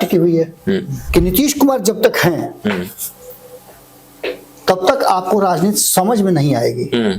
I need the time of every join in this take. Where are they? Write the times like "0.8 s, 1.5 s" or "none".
0.9 s